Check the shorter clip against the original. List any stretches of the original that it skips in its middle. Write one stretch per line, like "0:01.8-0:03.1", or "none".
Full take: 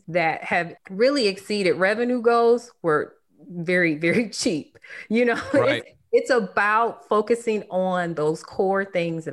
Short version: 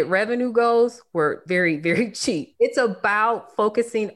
0:03.1-0:03.6
0:04.7-0:06.0